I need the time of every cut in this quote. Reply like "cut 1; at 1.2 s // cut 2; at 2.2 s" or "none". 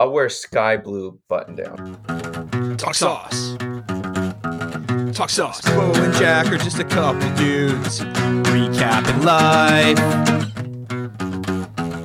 cut 1; at 2.1 s